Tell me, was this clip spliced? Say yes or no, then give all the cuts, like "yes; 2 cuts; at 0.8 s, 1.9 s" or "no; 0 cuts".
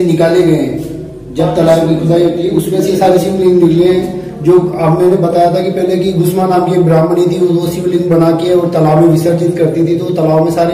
no; 0 cuts